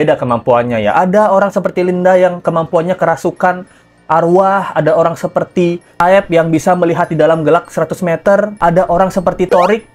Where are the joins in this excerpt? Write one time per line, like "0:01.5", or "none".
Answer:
none